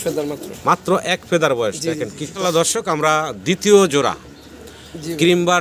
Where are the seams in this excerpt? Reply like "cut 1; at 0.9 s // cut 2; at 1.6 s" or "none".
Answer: cut 1; at 2.2 s